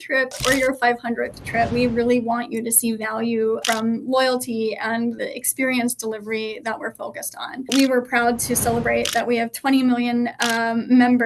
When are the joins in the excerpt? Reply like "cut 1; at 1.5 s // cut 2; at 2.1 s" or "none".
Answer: cut 1; at 1.7 s // cut 2; at 3.6 s // cut 3; at 5.2 s // cut 4; at 7.7 s